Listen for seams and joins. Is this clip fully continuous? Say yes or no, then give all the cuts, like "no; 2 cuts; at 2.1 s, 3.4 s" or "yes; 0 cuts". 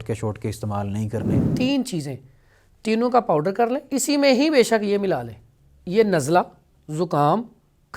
no; 2 cuts; at 1.4 s, 3.8 s